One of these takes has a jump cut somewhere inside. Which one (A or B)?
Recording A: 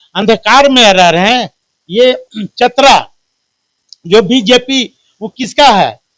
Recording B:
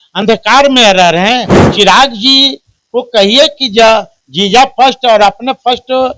B